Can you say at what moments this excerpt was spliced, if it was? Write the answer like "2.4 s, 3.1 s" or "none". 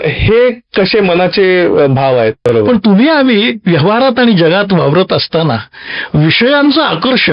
2.5 s